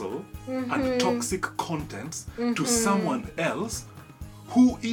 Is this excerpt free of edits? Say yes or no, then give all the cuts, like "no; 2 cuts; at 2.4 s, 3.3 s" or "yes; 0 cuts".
yes; 0 cuts